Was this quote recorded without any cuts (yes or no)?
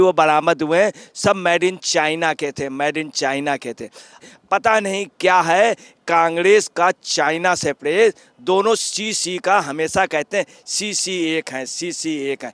no